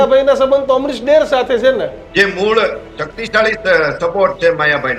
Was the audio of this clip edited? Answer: yes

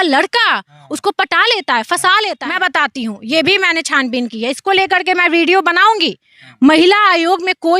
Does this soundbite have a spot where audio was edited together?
yes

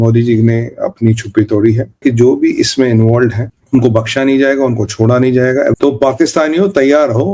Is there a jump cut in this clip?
yes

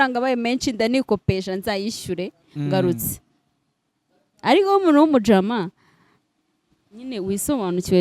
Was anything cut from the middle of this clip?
no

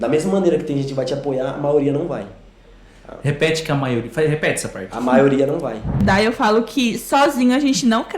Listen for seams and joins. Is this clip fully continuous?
no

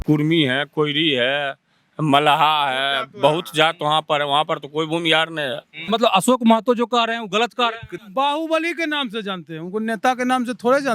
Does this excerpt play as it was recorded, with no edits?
no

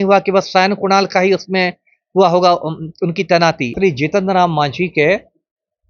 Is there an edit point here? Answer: yes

